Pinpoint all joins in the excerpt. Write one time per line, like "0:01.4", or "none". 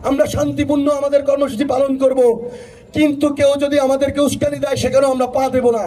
none

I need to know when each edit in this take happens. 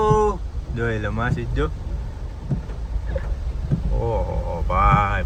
none

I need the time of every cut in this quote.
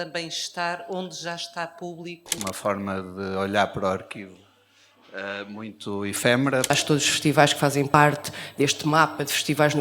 0:02.2
0:06.7
0:07.9

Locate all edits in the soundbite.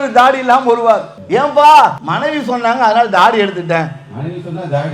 0:01.1
0:02.1

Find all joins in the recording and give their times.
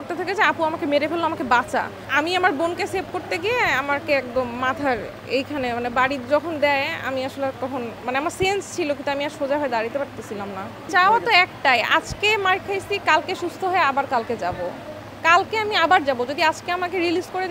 0:02.0
0:10.8

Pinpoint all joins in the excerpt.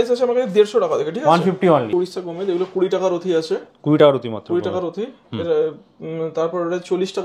0:01.9

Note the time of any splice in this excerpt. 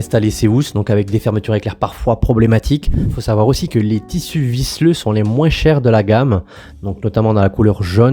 0:03.0

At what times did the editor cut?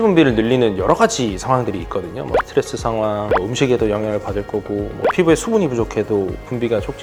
none

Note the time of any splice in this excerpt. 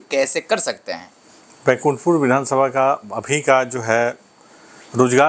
none

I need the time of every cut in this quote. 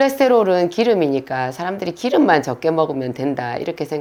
none

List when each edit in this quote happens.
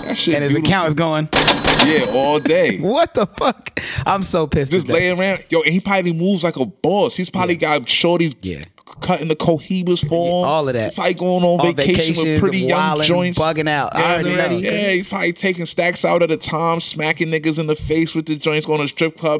0:14.5

